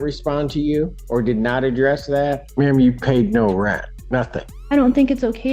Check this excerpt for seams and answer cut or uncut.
cut